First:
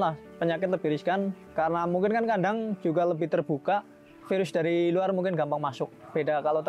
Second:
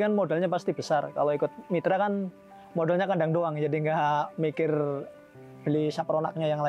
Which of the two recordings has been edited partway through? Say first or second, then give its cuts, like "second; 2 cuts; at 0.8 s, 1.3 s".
first; 1 cut; at 4.2 s